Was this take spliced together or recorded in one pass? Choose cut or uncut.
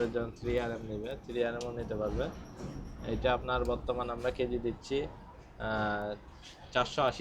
uncut